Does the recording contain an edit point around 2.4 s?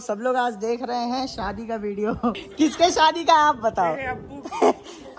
yes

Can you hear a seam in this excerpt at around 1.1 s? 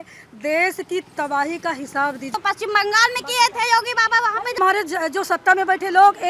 no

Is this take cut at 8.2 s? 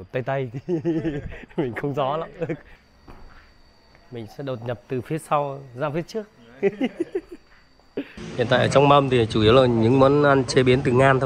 yes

